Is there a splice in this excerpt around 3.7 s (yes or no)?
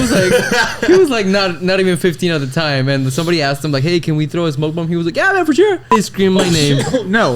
no